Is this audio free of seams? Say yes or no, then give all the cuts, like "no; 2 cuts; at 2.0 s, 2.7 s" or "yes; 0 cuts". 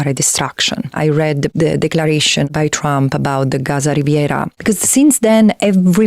no; 3 cuts; at 1.2 s, 2.5 s, 4.5 s